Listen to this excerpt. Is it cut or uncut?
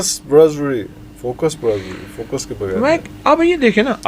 uncut